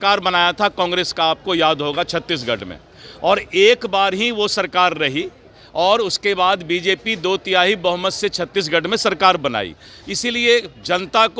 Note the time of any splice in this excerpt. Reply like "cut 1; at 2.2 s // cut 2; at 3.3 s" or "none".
none